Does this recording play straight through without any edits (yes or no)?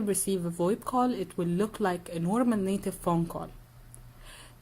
no